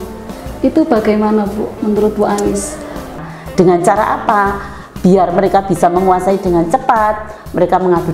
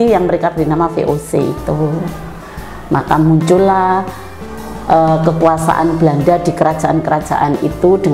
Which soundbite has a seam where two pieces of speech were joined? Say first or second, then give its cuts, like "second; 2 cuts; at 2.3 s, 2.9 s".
first; 1 cut; at 3.2 s